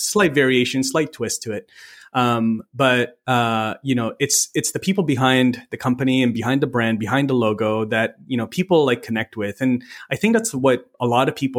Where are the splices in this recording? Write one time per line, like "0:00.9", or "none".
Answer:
none